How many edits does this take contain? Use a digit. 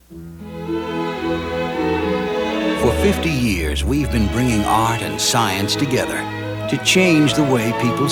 0